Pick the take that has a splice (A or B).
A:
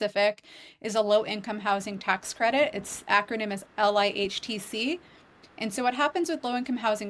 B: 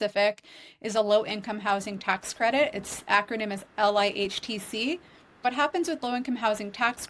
B